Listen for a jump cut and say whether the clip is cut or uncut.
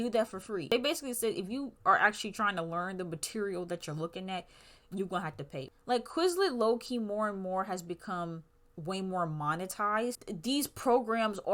cut